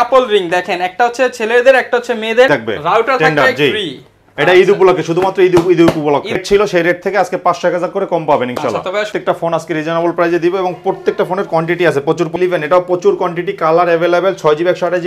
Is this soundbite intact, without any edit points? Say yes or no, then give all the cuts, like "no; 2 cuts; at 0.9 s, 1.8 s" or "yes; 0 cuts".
no; 4 cuts; at 2.5 s, 6.4 s, 9.1 s, 12.3 s